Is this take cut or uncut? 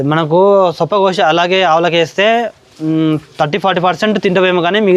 uncut